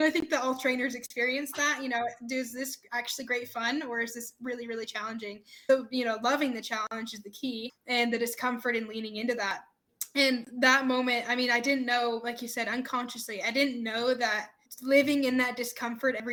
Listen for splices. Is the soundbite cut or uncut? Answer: uncut